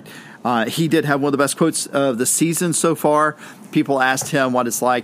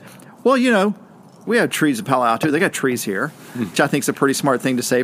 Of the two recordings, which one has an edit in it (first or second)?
second